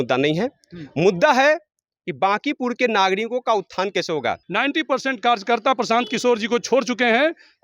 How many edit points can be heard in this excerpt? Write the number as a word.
one